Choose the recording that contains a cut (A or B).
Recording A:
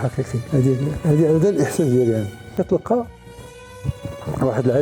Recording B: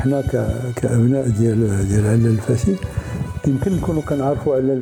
A